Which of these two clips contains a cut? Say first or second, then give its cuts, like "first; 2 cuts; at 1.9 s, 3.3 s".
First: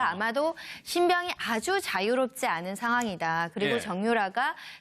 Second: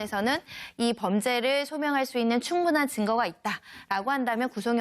second; 1 cut; at 2.7 s